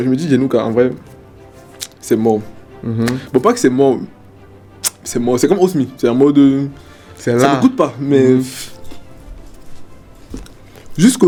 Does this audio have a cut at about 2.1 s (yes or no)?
no